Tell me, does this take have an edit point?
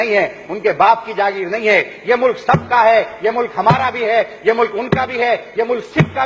no; 0 cuts

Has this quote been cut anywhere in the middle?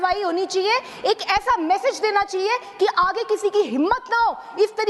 no; 0 cuts

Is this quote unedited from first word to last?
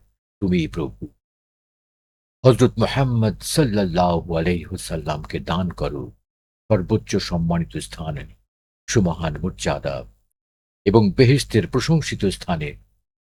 yes; 0 cuts

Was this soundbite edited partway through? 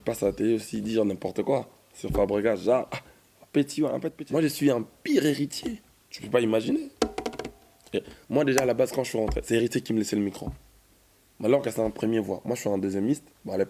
yes; 1 cut; at 4.2 s

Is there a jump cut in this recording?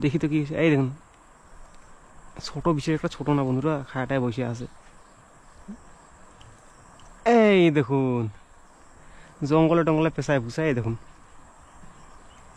no; 0 cuts

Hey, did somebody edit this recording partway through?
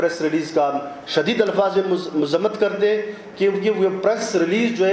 no; 0 cuts

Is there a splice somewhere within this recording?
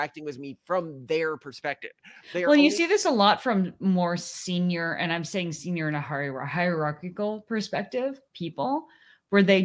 no; 0 cuts

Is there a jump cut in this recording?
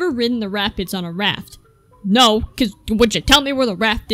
no; 0 cuts

